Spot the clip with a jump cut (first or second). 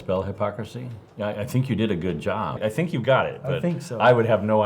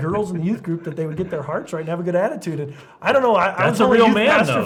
first